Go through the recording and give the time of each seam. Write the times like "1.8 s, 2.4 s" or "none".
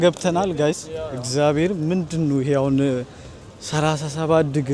none